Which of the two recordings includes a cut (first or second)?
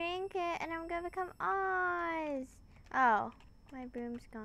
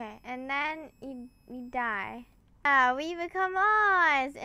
second